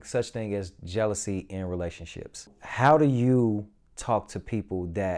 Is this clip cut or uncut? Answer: cut